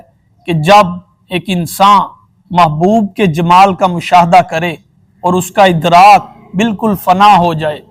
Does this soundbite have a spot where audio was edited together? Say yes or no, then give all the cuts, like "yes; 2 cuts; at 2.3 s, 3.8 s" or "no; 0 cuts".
no; 0 cuts